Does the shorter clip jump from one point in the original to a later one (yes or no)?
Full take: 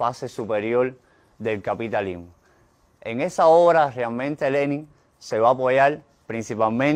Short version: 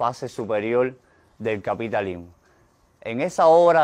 no